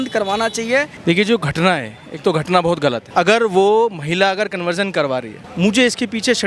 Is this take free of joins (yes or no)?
yes